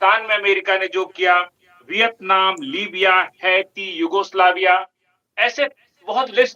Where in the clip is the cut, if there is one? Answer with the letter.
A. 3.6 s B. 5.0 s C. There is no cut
C